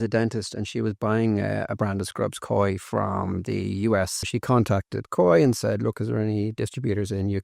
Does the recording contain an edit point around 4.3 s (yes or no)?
yes